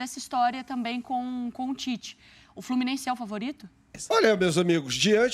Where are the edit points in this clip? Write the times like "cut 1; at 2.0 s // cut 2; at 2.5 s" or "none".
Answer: cut 1; at 3.9 s